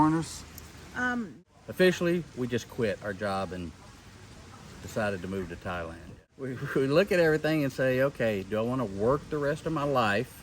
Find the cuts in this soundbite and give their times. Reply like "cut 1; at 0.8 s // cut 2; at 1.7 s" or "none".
cut 1; at 1.0 s // cut 2; at 6.5 s